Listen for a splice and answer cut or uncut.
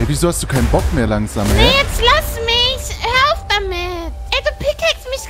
cut